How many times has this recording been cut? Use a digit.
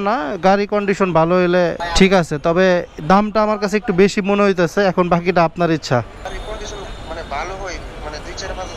2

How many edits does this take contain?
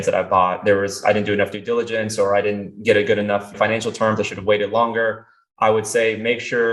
1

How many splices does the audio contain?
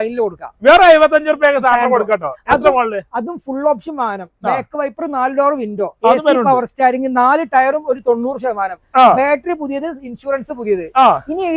0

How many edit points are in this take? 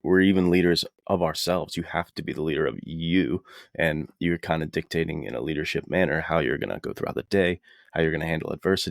1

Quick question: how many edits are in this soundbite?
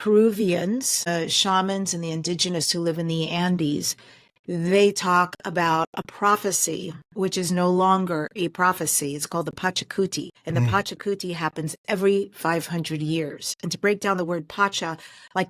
2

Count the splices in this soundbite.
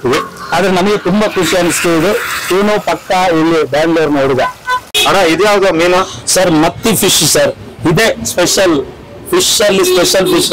1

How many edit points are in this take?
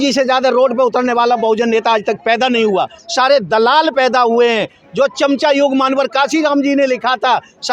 0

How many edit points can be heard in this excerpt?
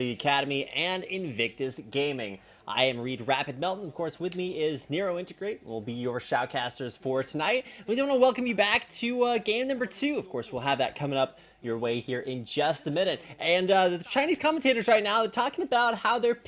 0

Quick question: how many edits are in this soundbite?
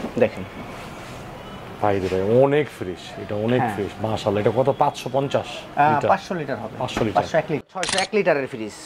1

